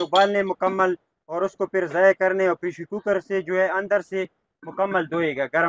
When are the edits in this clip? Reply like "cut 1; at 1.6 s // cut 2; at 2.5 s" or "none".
none